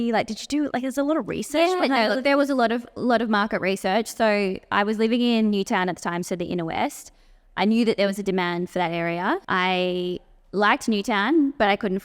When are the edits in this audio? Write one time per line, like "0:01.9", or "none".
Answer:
0:09.4